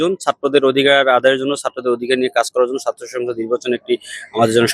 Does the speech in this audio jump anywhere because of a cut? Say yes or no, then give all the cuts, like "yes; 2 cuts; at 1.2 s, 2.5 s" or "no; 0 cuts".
no; 0 cuts